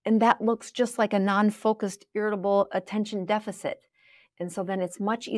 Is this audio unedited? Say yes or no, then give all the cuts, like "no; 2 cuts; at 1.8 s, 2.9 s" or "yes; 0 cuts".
yes; 0 cuts